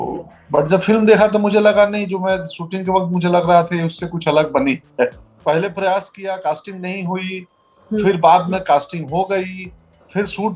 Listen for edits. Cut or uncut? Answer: cut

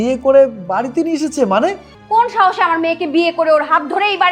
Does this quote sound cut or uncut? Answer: cut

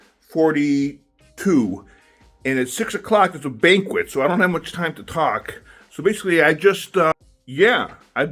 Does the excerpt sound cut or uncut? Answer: cut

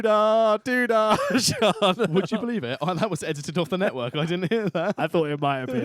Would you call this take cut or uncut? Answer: uncut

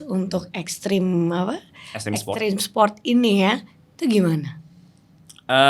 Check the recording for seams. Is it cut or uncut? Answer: uncut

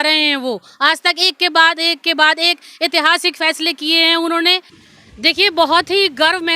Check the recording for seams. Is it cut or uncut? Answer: cut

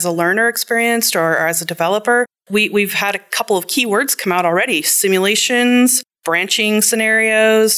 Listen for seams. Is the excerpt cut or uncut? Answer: uncut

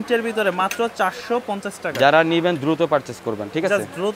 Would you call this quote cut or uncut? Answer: uncut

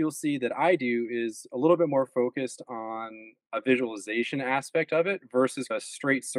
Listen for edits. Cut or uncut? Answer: uncut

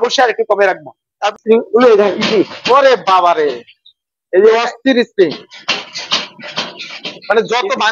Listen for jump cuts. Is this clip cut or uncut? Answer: cut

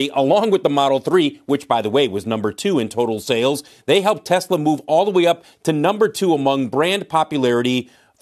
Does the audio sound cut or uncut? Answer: uncut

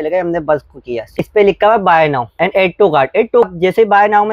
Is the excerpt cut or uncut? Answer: cut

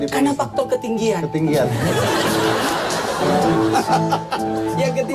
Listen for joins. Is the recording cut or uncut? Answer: uncut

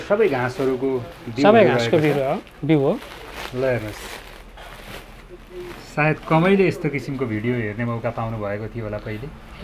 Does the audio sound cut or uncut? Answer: uncut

